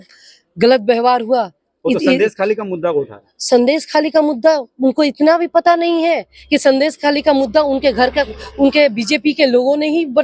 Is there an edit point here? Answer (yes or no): no